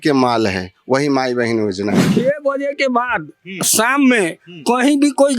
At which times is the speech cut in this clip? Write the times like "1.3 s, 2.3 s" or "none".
2.1 s

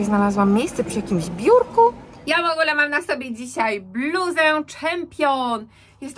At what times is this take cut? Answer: 2.2 s

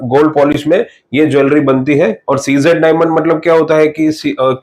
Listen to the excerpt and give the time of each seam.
none

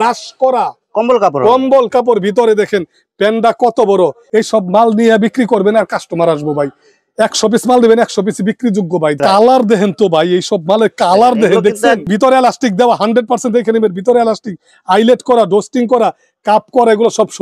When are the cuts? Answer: 4.2 s, 9.2 s, 12.1 s

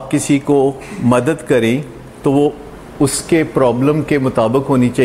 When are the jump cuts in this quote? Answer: none

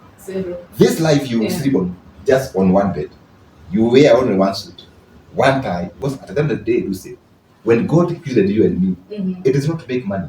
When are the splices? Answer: 5.9 s

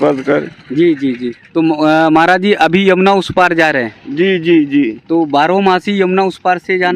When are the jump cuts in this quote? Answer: 1.4 s

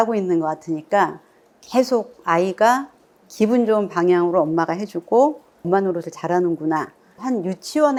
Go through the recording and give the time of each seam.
none

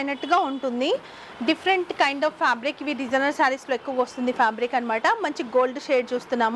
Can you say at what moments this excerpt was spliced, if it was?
none

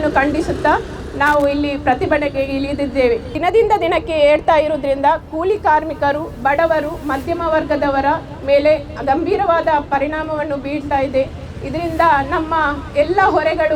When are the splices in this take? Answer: 3.3 s

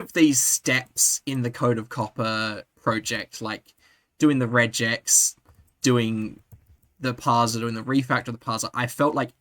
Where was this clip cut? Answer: 2.7 s

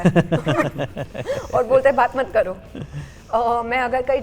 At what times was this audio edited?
none

